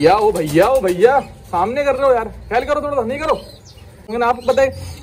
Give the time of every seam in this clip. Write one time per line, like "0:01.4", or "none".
0:04.1